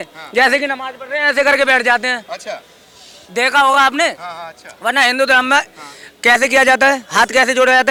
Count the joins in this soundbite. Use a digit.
0